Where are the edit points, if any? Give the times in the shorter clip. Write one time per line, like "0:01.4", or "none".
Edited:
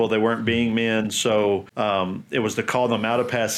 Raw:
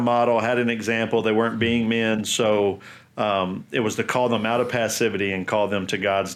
0:01.7